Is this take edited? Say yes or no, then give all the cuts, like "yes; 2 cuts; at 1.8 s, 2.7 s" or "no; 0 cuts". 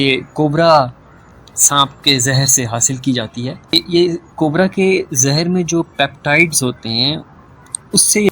yes; 1 cut; at 3.7 s